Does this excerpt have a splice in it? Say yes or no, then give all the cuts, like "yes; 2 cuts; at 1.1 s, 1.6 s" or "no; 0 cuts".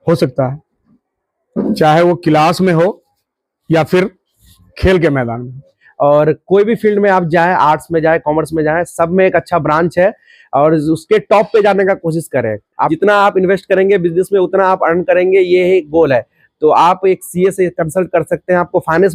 yes; 2 cuts; at 5.8 s, 12.8 s